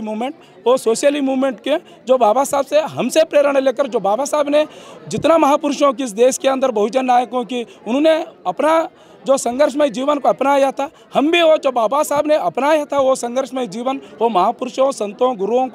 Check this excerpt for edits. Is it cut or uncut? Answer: uncut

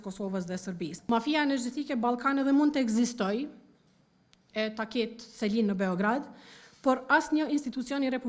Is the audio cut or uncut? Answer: cut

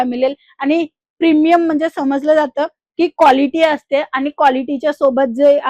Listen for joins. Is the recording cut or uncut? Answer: uncut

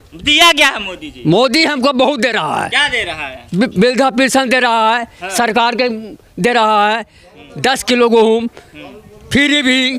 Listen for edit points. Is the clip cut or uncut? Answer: uncut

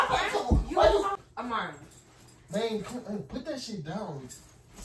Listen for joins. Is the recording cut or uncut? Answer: cut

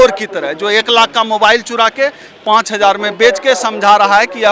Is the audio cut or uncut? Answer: uncut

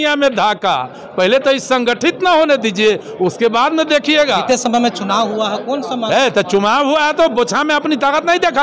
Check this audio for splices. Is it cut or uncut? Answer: uncut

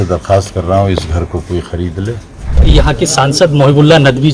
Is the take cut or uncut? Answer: cut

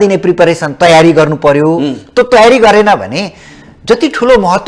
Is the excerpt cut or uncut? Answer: uncut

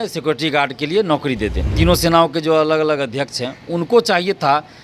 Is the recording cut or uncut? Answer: cut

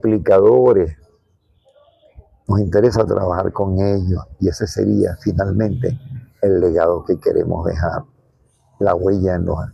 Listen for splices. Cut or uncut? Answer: uncut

